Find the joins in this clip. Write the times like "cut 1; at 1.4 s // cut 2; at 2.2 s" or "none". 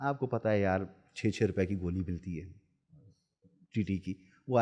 none